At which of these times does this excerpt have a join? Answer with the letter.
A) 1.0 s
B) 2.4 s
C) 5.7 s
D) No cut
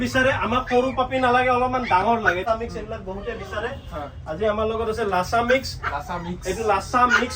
B